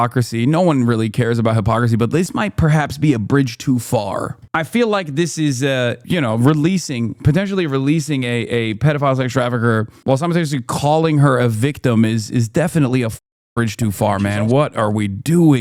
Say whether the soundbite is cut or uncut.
uncut